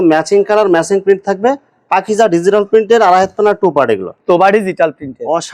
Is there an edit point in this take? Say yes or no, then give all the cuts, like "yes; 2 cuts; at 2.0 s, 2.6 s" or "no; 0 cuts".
yes; 1 cut; at 4.2 s